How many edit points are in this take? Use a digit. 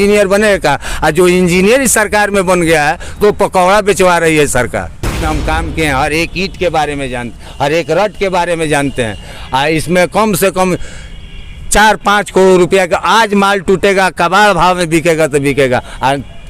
1